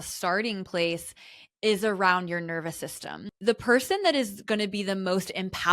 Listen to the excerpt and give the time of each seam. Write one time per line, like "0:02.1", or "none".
0:03.3

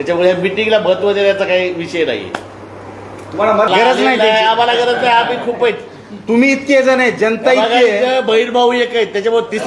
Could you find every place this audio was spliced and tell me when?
0:03.7

